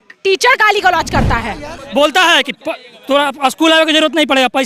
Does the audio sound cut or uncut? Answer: cut